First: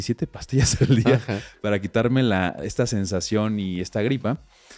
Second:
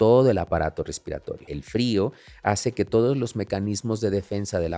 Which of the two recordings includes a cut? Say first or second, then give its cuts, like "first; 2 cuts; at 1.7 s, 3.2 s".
second; 1 cut; at 1.5 s